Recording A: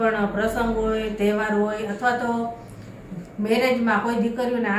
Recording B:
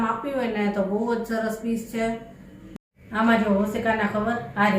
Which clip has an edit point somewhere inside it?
B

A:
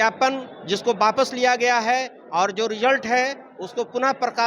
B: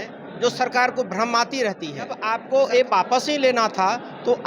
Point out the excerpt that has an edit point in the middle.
B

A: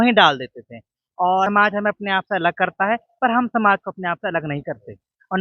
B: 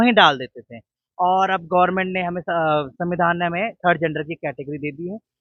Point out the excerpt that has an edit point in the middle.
A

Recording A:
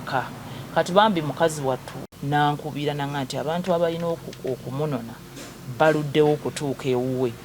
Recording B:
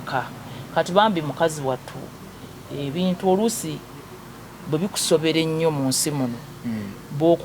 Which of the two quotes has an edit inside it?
A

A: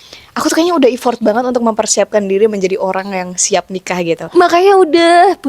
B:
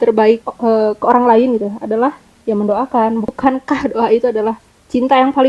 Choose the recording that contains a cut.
A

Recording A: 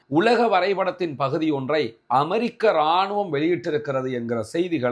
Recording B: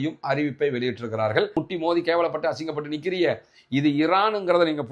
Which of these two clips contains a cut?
B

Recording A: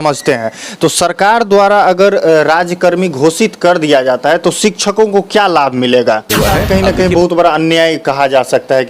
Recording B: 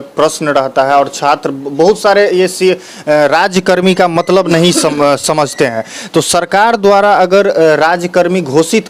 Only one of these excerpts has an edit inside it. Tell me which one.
A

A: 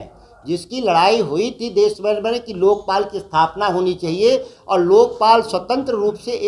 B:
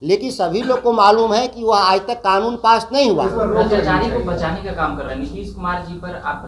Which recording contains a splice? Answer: B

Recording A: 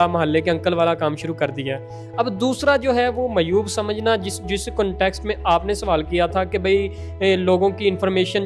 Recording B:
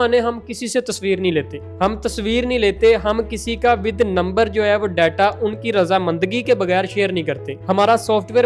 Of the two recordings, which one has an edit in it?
B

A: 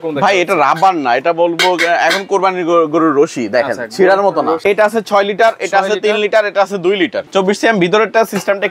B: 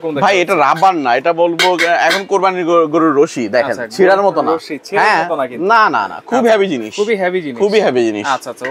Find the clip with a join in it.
A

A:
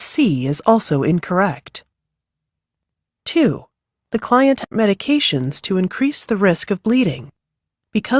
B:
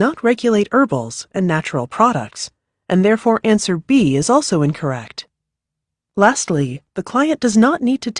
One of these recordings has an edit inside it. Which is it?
A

